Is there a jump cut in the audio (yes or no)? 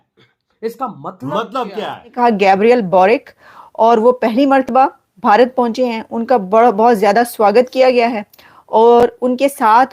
yes